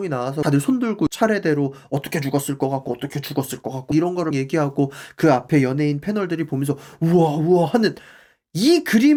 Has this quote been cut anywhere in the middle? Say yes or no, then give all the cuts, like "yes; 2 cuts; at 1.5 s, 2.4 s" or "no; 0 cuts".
no; 0 cuts